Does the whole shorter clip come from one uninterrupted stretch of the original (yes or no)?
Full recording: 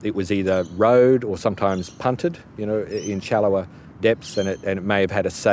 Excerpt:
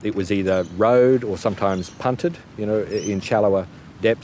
yes